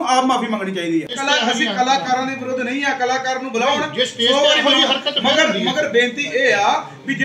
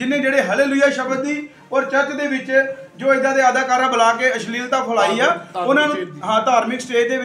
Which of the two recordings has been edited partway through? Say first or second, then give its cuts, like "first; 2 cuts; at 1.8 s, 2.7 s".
first; 1 cut; at 1.1 s